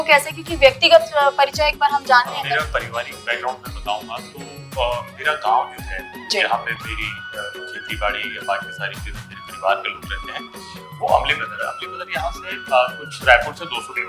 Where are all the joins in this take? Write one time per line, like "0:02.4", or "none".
0:02.5